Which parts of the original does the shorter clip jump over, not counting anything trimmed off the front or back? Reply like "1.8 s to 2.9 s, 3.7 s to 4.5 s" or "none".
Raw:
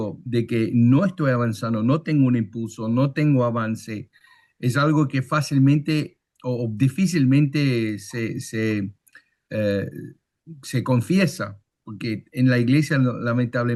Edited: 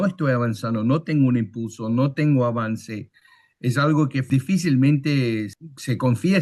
5.2 s to 6.7 s, 8.1 s to 10.4 s